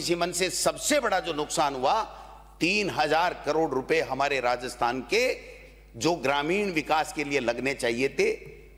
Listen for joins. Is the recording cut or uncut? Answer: uncut